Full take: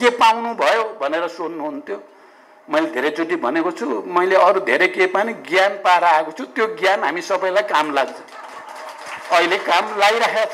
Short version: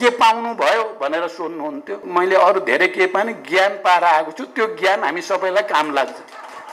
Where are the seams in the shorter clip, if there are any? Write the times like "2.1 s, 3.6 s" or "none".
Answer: 2.0 s